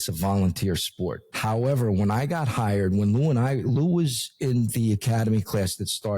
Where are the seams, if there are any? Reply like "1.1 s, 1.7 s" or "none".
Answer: 1.3 s